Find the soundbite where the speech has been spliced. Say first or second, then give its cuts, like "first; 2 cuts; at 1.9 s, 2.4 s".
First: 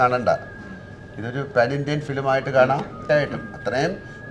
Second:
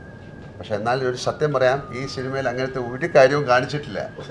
first; 1 cut; at 3.0 s